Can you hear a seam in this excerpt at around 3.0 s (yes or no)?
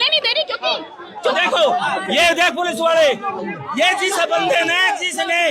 no